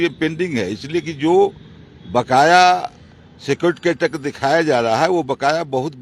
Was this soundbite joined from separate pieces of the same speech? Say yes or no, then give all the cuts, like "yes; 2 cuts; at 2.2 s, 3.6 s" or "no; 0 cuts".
no; 0 cuts